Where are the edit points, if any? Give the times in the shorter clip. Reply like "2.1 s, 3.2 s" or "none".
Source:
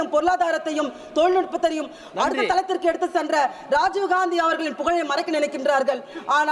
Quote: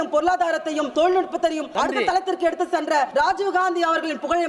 0.9 s, 1.6 s, 3.1 s